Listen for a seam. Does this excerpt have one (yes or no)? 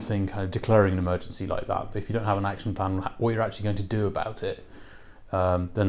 no